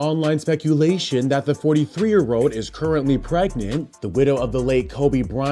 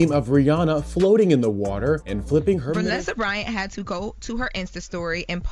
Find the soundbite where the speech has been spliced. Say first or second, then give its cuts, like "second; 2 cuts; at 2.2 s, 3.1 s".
second; 1 cut; at 2.8 s